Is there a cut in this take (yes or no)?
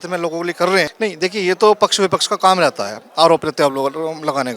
yes